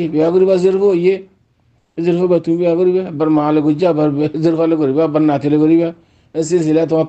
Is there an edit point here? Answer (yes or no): no